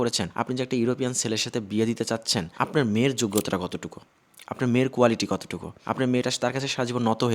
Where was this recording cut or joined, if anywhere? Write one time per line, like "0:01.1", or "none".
none